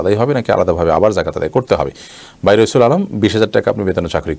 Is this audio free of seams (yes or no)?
yes